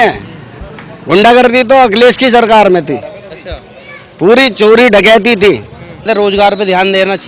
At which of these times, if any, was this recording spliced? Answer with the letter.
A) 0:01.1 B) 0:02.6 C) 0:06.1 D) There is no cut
C